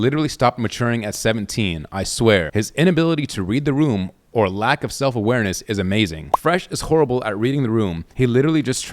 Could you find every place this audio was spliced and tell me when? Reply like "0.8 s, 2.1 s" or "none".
2.5 s, 6.2 s